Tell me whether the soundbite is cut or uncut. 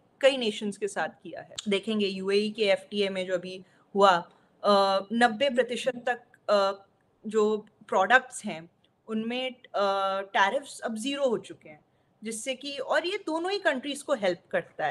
cut